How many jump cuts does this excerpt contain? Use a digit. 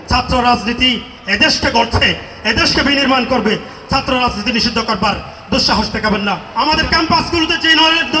1